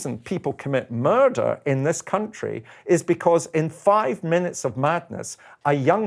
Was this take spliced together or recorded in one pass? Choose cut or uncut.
uncut